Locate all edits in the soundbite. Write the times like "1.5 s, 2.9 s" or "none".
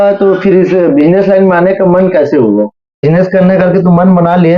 3.0 s